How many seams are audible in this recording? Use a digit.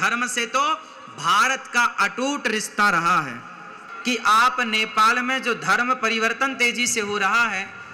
1